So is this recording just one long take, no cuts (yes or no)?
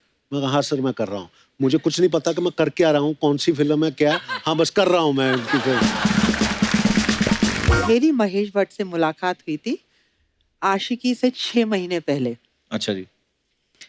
no